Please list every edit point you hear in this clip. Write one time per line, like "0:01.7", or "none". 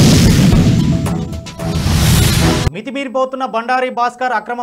0:02.5